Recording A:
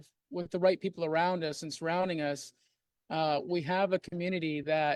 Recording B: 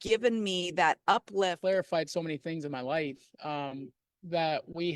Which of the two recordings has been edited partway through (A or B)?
B